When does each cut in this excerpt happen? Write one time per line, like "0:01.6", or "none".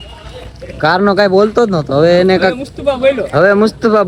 none